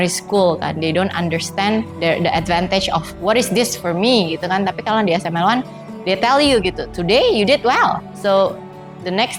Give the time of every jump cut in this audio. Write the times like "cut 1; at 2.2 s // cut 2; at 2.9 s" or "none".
none